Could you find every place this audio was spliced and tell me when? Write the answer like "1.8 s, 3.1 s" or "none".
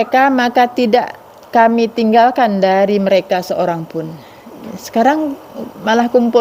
none